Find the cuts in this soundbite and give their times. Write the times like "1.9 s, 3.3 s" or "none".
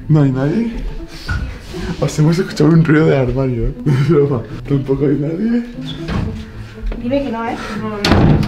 3.7 s, 4.5 s, 5.8 s